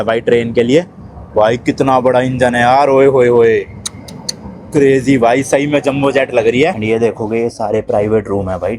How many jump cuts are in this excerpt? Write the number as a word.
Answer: one